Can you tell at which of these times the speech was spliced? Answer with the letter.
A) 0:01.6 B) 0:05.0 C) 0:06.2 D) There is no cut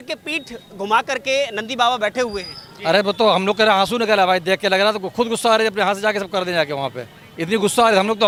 D